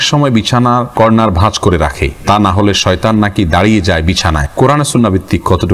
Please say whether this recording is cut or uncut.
cut